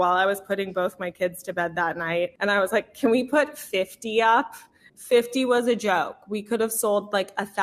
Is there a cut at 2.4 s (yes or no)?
yes